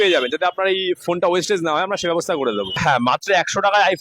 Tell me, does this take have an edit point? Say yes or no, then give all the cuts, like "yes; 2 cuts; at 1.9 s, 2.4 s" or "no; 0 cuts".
yes; 1 cut; at 2.8 s